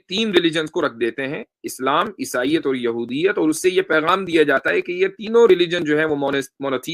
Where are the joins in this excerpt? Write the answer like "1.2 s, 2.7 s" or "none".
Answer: none

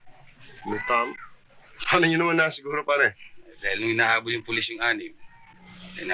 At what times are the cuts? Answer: none

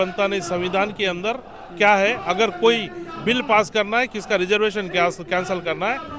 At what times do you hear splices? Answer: none

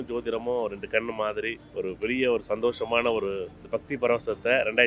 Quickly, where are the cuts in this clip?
1.6 s, 3.5 s

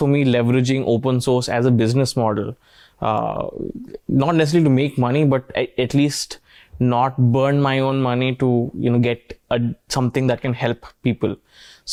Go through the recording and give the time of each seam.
none

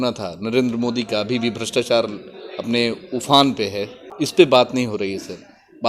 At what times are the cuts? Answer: 3.9 s

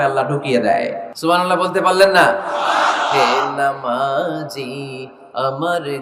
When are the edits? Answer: 1.1 s

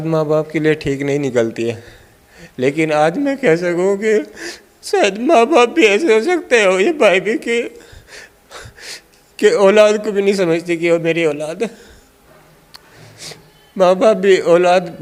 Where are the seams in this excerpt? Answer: none

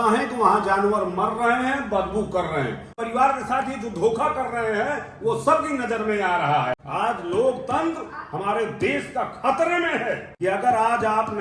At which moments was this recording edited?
2.9 s, 6.8 s, 10.3 s

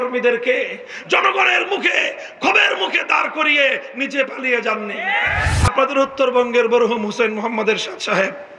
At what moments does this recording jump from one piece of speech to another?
5.5 s

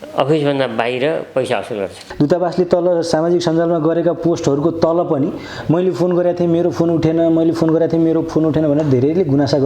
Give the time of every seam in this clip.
2.0 s

